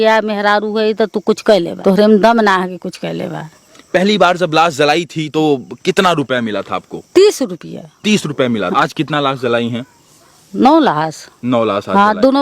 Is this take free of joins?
no; 3 cuts; at 1.7 s, 3.8 s, 8.7 s

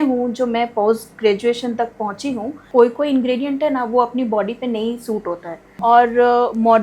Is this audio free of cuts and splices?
no; 2 cuts; at 2.6 s, 5.8 s

